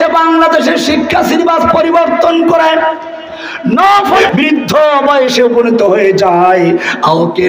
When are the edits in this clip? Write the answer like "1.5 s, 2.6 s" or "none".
4.2 s